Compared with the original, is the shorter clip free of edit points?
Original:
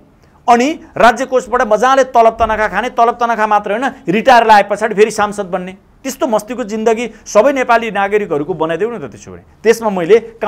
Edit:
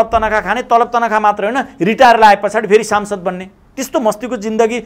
yes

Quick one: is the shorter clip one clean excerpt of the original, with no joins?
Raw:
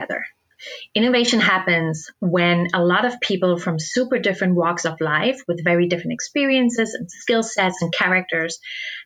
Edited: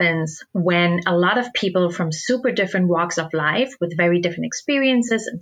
yes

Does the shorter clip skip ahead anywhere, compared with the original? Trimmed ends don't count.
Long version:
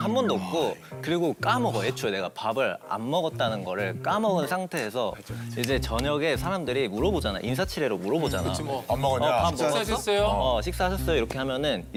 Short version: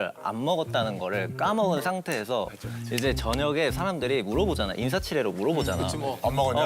no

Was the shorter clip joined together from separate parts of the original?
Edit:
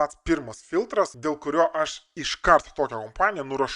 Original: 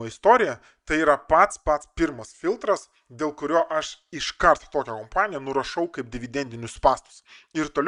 yes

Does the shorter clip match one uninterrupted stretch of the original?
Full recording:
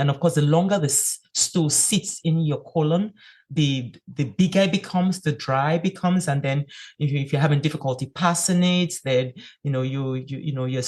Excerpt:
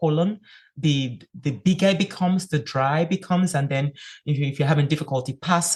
yes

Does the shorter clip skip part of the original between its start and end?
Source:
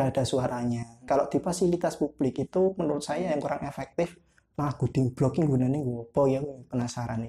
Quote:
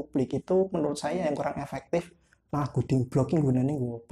no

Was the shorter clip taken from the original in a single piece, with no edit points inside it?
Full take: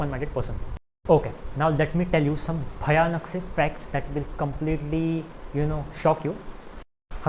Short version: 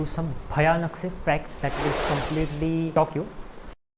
no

